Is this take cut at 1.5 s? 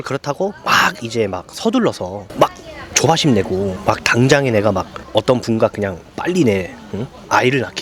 no; 0 cuts

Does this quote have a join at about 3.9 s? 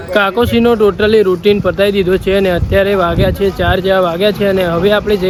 no; 0 cuts

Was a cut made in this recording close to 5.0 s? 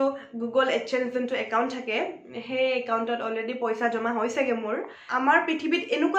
yes; 1 cut; at 5.0 s

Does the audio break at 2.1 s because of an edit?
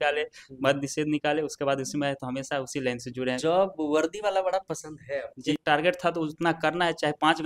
no; 2 cuts; at 3.4 s, 5.6 s

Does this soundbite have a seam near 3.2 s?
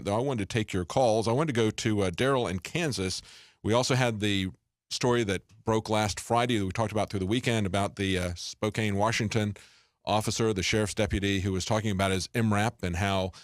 yes; 1 cut; at 3.2 s

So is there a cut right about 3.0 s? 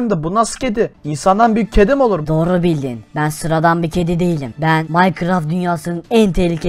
yes; 4 cuts; at 1.1 s, 2.2 s, 3.0 s, 4.9 s

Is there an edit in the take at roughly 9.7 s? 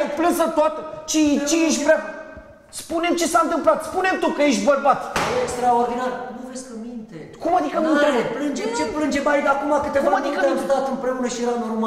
no; 0 cuts

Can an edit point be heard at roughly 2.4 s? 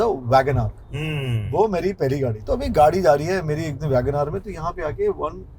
yes; 1 cut; at 2.4 s

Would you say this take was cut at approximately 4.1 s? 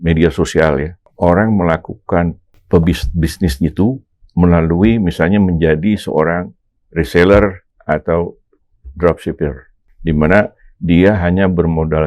no; 3 cuts; at 1.0 s, 2.5 s, 9.8 s

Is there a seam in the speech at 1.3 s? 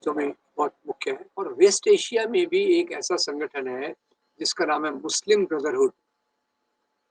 yes; 1 cut; at 1.3 s

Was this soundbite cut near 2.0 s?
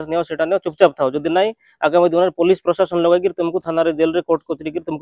no; 0 cuts

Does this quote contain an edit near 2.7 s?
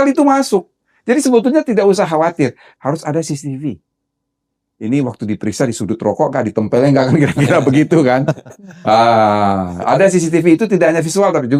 yes; 1 cut; at 2.7 s

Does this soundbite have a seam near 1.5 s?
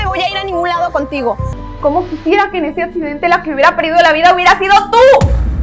yes; 1 cut; at 1.5 s

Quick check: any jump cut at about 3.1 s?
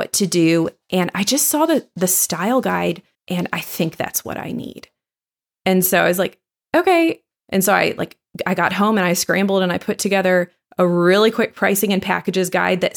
yes; 2 cuts; at 3.1 s, 7.2 s

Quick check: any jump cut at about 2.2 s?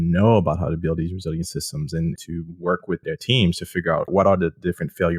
yes; 3 cuts; at 2.2 s, 3.0 s, 4.1 s

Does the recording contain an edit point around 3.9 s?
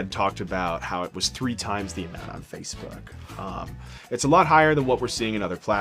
yes; 1 cut; at 3.9 s

